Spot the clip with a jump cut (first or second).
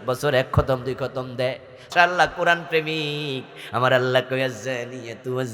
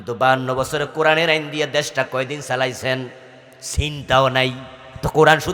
first